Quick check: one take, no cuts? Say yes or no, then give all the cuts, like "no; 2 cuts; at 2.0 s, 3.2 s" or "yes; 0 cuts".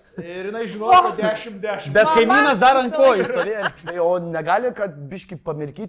no; 1 cut; at 3.8 s